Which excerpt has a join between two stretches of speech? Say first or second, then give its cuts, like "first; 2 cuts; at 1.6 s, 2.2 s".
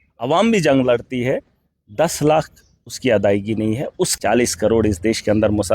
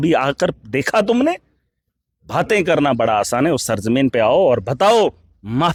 first; 1 cut; at 4.1 s